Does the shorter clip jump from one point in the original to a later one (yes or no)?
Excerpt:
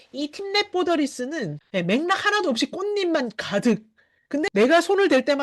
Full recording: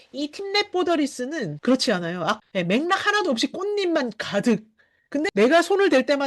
yes